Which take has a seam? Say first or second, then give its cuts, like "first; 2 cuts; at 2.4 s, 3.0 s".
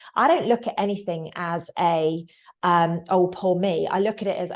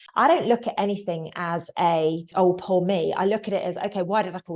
second; 1 cut; at 2.3 s